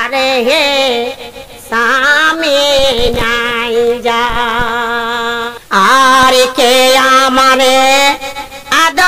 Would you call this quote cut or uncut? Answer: cut